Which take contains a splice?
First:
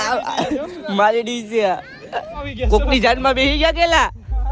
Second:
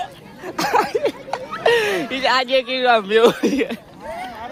first; 1 cut; at 2.4 s

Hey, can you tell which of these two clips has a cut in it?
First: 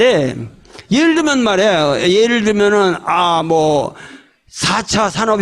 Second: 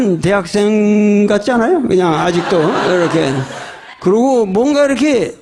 first; 1 cut; at 3.7 s

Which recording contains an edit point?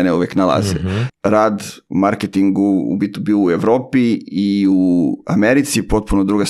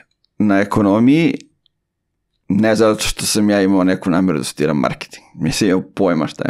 first; 1 cut; at 1.1 s

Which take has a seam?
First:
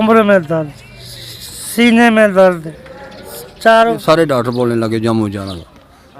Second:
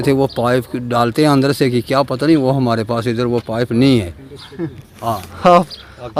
first; 1 cut; at 4.0 s

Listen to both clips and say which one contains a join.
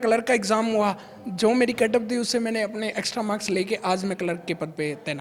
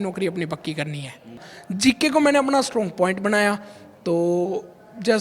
second; 1 cut; at 1.5 s

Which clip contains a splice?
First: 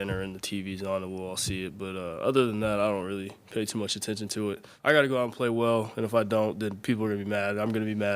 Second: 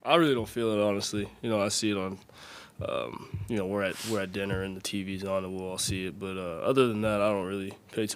first; 1 cut; at 4.7 s

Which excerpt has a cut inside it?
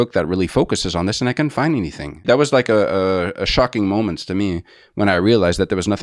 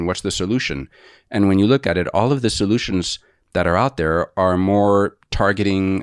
first; 1 cut; at 2.2 s

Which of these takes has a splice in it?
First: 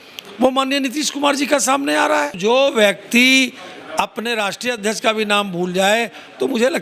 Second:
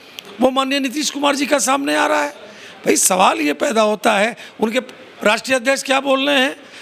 first; 1 cut; at 2.4 s

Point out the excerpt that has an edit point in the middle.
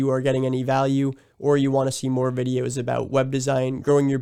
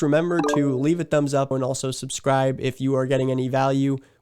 second; 1 cut; at 1.5 s

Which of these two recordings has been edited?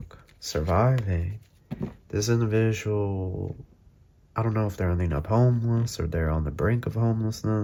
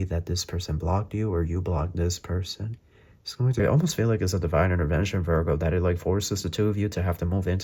second; 1 cut; at 3.6 s

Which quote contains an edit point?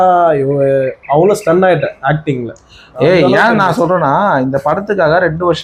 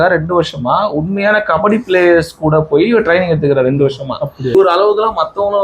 second; 1 cut; at 4.5 s

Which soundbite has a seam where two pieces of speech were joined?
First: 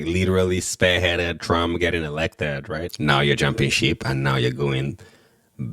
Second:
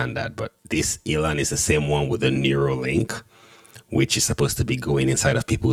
first; 1 cut; at 2.9 s

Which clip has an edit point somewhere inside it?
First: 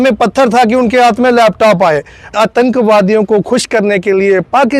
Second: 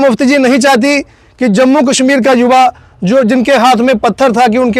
first; 1 cut; at 2.3 s

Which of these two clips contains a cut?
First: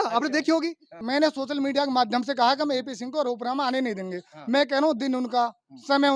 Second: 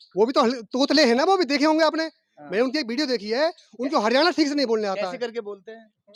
first; 1 cut; at 0.9 s

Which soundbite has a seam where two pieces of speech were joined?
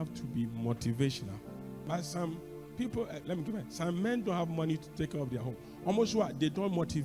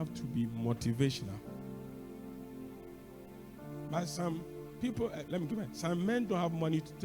first; 1 cut; at 1.8 s

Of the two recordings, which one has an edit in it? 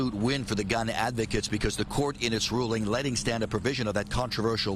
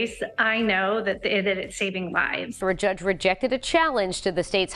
second; 1 cut; at 2.5 s

